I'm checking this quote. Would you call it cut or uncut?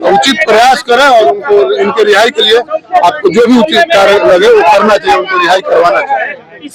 uncut